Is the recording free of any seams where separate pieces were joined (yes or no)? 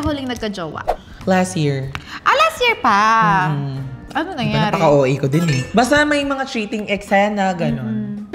yes